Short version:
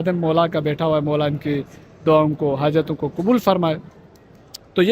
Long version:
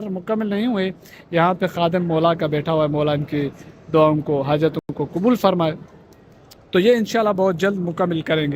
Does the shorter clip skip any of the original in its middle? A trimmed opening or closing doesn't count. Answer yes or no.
yes